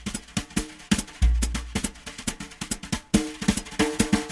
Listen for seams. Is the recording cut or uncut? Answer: uncut